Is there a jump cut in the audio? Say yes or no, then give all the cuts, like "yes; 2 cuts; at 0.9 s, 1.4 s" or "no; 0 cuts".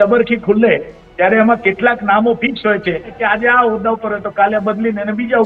yes; 1 cut; at 3.2 s